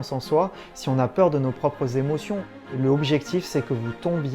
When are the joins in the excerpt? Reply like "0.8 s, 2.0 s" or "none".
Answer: 2.5 s